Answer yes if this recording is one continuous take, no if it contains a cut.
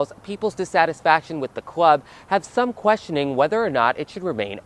yes